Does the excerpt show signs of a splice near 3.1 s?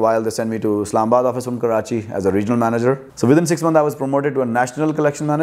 yes; 1 cut; at 3.1 s

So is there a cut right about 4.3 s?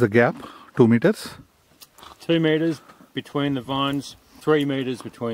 yes; 1 cut; at 4.3 s

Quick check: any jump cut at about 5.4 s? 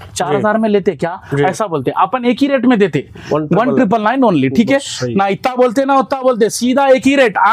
no; 0 cuts

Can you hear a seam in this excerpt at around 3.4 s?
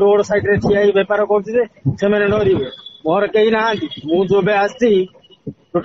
no; 0 cuts

